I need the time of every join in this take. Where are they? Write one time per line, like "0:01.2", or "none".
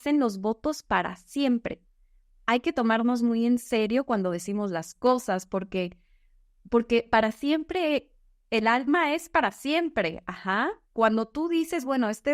none